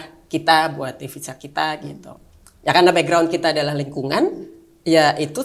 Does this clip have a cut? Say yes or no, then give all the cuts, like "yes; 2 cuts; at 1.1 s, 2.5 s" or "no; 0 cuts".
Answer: no; 0 cuts